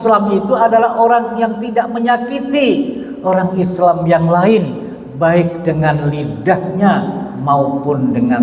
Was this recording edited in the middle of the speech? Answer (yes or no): no